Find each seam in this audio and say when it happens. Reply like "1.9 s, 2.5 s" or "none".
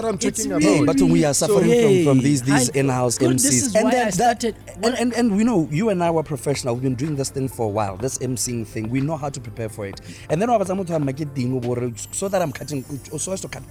none